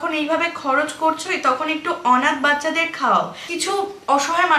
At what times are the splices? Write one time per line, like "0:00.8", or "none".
0:03.5